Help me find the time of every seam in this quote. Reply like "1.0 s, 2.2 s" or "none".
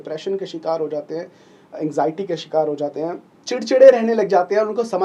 3.3 s